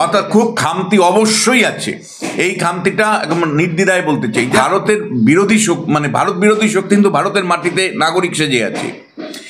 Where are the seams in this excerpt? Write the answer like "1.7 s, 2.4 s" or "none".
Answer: 4.6 s